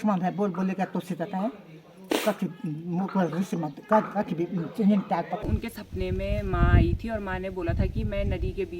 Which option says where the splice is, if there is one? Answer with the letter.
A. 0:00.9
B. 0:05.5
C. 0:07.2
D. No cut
B